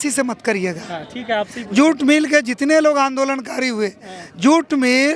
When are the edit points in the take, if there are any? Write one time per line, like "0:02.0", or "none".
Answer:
none